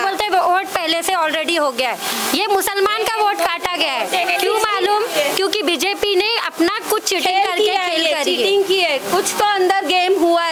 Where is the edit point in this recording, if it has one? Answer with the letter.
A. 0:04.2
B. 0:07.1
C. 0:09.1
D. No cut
D